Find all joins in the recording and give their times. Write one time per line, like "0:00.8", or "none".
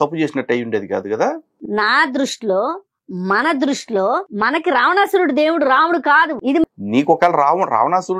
0:01.6
0:06.8